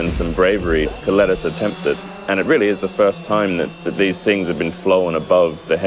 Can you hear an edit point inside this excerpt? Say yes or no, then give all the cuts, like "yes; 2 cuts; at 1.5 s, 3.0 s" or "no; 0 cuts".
no; 0 cuts